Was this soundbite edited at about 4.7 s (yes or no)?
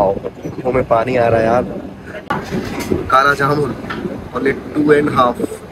no